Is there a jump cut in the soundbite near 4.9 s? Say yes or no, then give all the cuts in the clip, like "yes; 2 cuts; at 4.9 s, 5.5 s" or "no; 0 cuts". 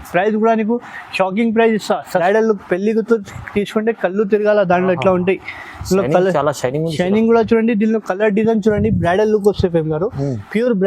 no; 1 cut; at 2.2 s